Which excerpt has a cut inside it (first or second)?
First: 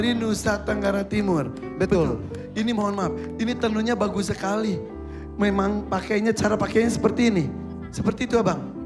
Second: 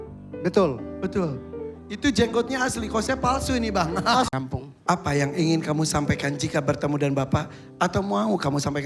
second